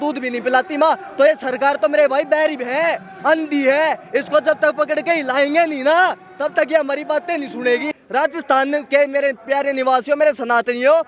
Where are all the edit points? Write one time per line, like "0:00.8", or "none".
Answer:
0:08.0